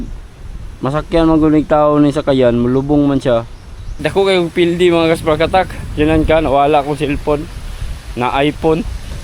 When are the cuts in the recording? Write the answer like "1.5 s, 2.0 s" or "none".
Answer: 4.0 s